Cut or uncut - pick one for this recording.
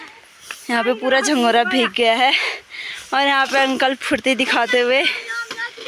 uncut